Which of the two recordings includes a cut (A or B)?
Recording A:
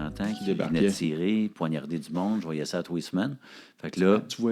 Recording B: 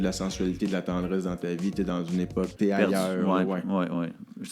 B